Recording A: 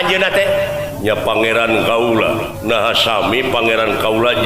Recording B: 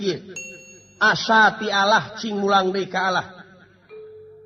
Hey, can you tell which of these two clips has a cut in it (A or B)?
A